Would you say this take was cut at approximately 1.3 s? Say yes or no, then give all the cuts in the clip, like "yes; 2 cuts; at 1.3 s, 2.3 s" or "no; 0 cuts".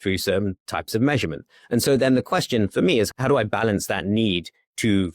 no; 1 cut; at 3.1 s